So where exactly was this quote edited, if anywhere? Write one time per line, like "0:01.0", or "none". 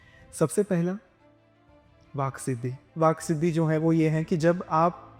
0:02.9

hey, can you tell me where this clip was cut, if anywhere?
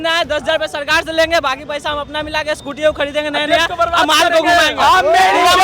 none

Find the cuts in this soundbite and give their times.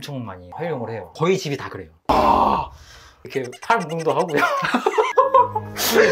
0:02.1

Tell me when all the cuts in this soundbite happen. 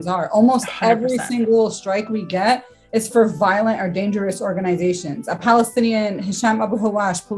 none

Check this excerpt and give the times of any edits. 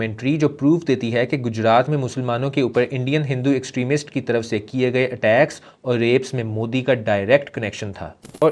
none

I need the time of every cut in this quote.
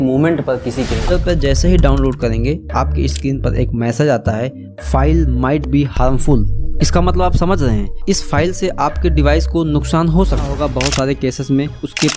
0:01.1
0:10.5

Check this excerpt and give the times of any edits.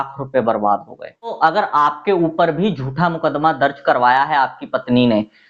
0:01.4

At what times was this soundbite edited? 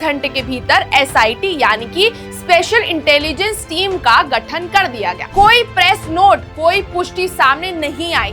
0:05.2

